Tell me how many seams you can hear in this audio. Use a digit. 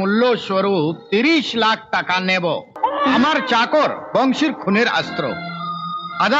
1